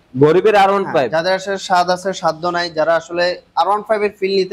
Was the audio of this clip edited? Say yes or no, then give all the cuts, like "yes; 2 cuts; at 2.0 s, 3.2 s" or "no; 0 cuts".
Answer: no; 0 cuts